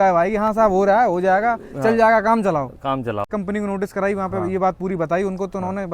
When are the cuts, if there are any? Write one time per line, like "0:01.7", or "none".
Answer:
0:03.3